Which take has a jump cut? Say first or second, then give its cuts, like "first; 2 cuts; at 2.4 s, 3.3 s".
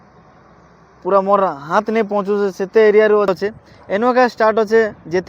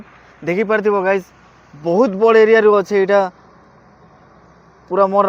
first; 1 cut; at 3.3 s